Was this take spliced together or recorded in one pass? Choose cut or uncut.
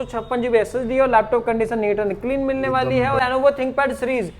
cut